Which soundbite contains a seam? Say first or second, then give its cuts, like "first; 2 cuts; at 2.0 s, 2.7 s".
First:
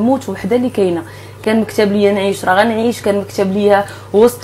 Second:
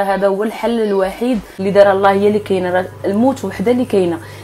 second; 1 cut; at 1.6 s